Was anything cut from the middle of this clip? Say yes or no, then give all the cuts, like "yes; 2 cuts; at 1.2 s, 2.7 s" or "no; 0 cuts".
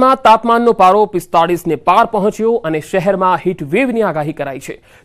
yes; 1 cut; at 1.9 s